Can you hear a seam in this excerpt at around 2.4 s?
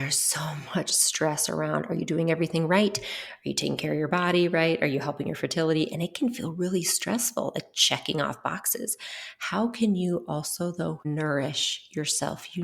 no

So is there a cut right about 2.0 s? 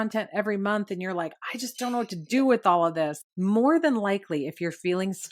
no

